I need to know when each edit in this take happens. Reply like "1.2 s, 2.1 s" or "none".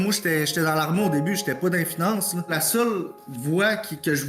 2.6 s